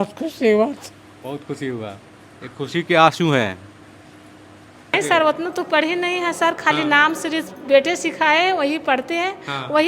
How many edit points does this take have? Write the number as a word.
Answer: one